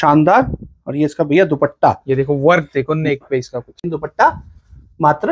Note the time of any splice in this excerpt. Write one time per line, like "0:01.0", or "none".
0:03.8